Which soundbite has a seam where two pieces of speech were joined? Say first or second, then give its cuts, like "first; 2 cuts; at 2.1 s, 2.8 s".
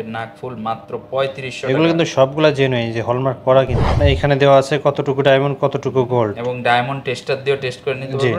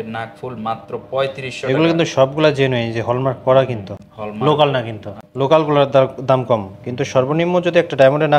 first; 1 cut; at 4.0 s